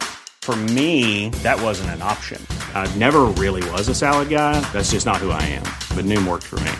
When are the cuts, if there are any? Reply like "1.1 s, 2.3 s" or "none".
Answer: none